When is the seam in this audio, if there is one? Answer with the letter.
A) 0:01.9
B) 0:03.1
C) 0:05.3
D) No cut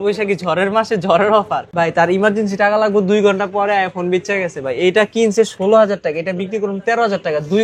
A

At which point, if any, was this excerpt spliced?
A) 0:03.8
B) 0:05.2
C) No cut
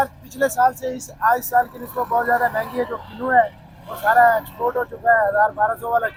C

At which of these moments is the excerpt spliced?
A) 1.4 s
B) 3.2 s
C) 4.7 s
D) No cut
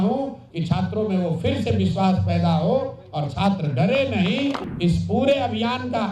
C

